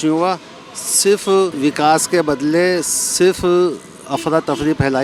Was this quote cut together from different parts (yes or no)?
no